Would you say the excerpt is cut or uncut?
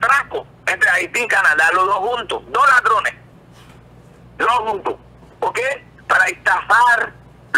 uncut